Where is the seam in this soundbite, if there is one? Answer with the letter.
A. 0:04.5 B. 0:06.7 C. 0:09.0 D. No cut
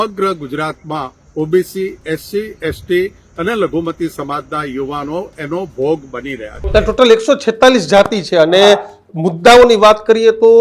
B